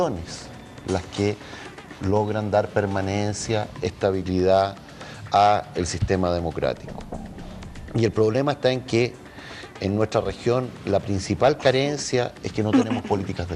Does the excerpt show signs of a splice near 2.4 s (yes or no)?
yes